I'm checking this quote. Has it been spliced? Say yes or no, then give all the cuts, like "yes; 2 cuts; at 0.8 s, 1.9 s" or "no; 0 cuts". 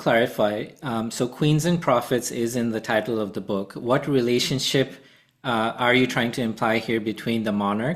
no; 0 cuts